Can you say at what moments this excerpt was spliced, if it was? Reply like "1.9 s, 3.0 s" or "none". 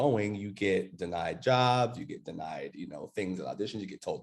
none